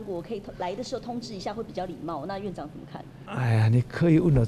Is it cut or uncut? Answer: cut